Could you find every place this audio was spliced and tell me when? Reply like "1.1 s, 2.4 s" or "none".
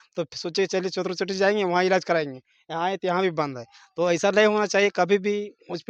none